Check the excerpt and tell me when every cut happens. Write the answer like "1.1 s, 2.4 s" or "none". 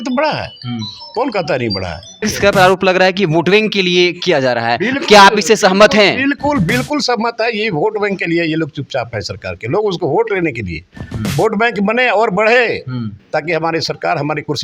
2.2 s